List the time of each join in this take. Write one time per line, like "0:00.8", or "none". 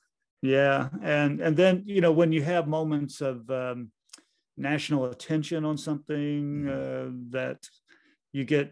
none